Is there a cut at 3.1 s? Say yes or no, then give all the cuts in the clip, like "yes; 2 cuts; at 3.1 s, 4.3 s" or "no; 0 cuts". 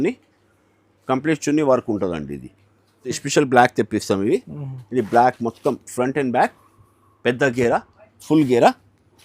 yes; 1 cut; at 3.1 s